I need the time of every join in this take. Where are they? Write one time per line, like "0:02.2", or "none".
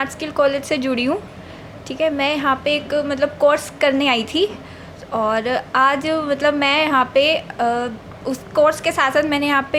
none